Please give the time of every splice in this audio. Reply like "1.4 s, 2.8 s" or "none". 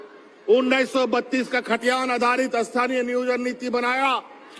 none